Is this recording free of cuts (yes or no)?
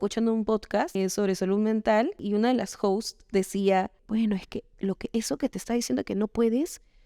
no